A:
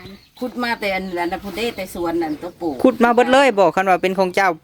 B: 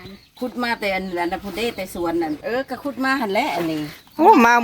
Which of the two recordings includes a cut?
B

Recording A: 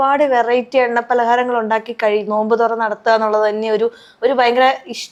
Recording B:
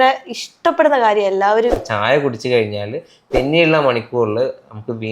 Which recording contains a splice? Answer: B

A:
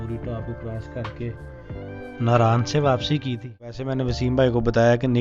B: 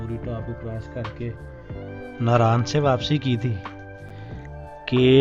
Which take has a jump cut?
A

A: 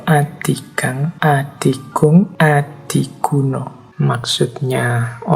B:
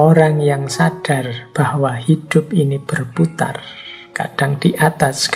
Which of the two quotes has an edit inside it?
A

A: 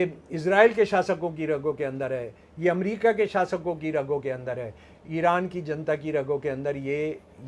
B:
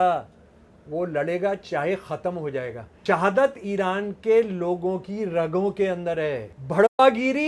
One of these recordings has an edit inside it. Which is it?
B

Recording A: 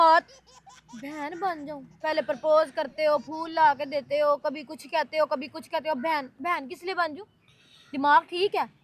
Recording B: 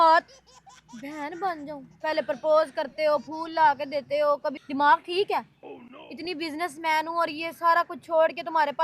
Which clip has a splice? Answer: B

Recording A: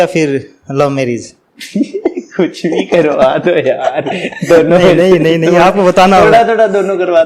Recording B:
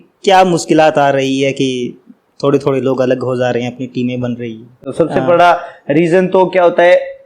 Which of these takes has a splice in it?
B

